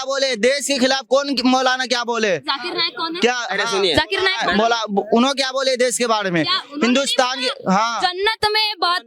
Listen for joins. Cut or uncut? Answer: uncut